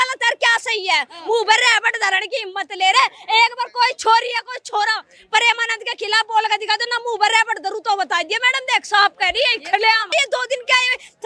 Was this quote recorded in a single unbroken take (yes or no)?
no